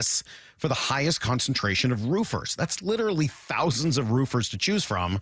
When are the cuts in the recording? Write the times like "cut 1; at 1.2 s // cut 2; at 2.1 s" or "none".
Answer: none